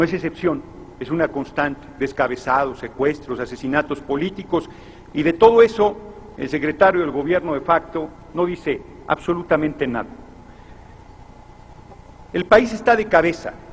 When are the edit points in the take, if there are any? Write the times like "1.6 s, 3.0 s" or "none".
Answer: 6.7 s